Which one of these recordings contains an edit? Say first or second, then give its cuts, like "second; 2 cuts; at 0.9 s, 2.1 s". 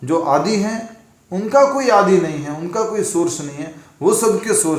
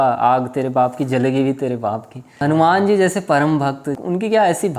second; 2 cuts; at 2.4 s, 4.0 s